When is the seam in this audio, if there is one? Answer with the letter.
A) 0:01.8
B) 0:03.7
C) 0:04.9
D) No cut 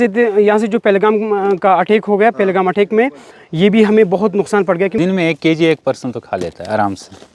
C